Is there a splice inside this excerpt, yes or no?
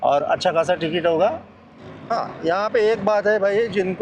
yes